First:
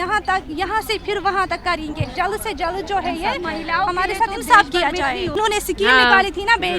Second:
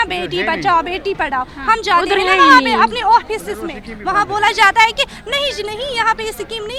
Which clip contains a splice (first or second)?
first